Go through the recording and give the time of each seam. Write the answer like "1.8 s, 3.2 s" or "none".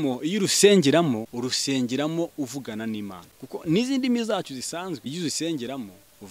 1.3 s, 3.3 s, 5.0 s